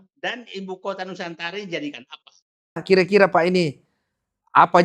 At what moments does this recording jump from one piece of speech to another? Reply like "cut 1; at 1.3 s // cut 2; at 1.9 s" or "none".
cut 1; at 2.8 s